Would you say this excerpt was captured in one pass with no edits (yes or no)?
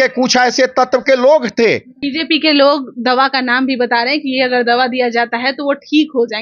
no